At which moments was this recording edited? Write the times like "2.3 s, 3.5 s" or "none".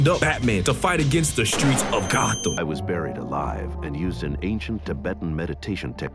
2.6 s